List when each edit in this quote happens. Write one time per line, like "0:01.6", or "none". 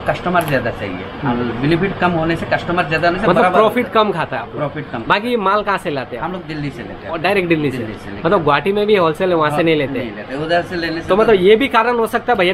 none